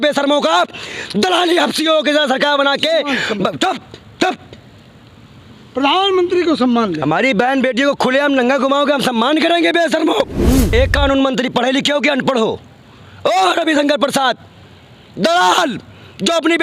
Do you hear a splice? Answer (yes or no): yes